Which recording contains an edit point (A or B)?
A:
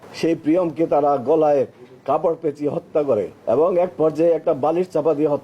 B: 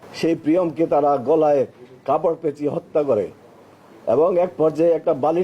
A